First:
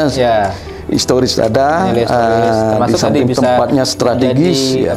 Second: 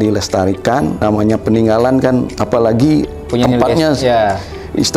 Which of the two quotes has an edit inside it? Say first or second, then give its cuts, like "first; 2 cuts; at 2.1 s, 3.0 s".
second; 2 cuts; at 1.0 s, 2.4 s